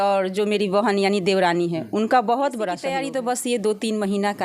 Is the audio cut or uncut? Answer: cut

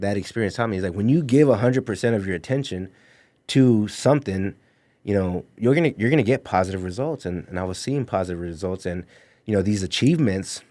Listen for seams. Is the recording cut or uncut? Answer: uncut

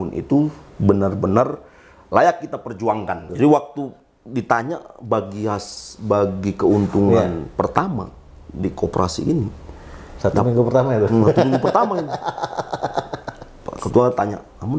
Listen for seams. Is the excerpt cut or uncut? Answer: cut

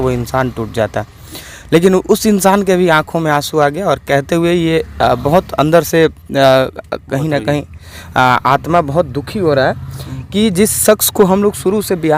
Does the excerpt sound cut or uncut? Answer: uncut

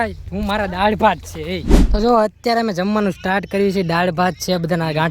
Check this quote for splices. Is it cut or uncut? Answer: cut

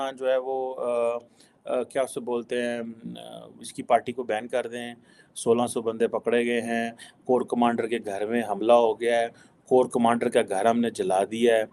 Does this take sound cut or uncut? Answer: uncut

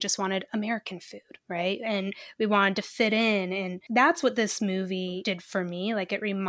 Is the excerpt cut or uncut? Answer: cut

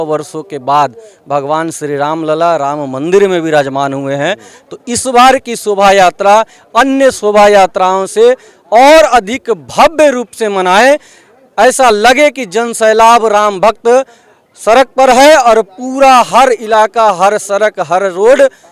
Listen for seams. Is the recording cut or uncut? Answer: uncut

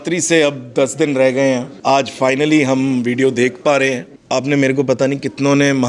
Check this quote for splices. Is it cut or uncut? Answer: cut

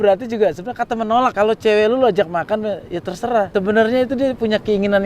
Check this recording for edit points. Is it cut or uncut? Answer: cut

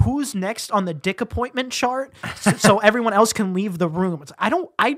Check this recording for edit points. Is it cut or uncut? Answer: uncut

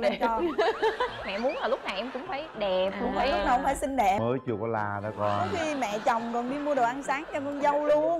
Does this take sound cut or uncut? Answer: cut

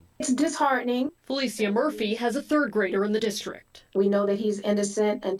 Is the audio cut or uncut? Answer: uncut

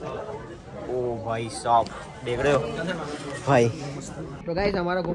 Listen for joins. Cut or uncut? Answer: uncut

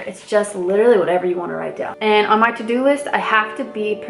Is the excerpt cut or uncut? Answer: cut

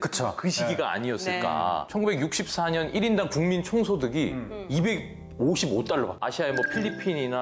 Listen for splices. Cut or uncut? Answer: cut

